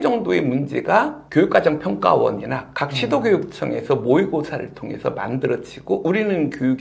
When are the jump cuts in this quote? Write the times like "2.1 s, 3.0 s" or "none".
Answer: 1.2 s